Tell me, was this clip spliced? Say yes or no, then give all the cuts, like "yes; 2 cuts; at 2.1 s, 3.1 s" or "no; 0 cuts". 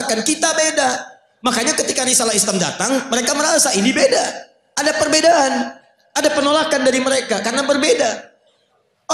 no; 0 cuts